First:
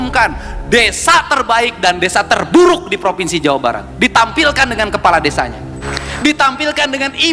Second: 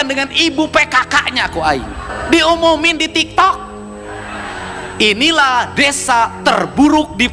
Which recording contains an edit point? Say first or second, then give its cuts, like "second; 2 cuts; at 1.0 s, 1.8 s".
first; 1 cut; at 5.8 s